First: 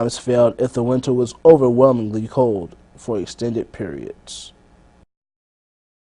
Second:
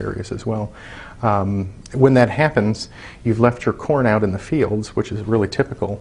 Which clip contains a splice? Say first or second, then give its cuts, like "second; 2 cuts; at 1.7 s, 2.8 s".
second; 1 cut; at 2.2 s